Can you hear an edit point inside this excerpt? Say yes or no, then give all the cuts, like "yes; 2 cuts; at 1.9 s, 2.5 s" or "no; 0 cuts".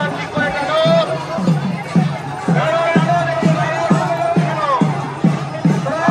no; 0 cuts